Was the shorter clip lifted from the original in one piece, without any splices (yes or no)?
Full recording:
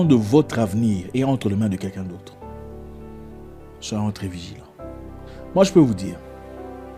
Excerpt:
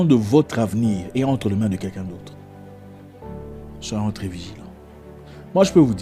yes